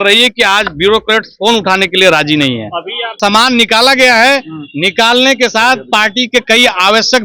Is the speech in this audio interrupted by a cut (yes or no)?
yes